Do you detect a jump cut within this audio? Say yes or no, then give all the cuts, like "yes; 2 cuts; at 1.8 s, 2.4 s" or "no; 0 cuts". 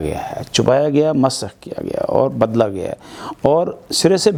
no; 0 cuts